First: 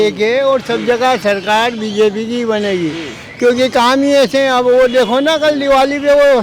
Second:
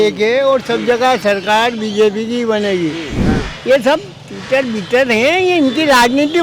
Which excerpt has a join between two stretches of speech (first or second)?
second